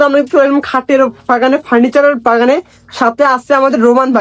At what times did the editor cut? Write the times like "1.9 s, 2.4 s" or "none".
none